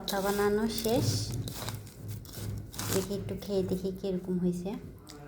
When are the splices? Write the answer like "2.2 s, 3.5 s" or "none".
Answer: none